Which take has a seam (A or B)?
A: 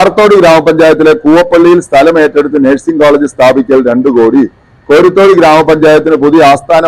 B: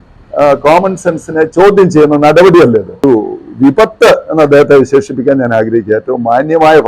B